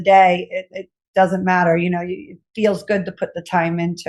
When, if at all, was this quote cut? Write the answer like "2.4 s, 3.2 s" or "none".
none